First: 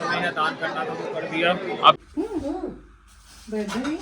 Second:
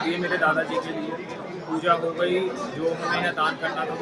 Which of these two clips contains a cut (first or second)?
first